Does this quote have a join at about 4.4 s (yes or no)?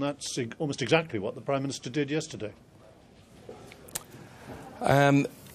no